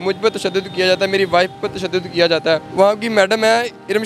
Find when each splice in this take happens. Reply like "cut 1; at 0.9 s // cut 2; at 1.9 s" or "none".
cut 1; at 2.7 s